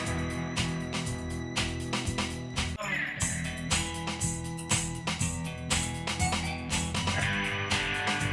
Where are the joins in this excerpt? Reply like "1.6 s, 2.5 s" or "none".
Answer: none